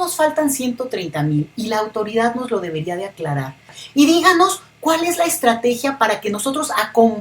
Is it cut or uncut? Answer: cut